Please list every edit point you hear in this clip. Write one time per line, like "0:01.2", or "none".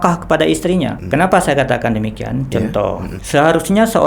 0:01.0
0:03.1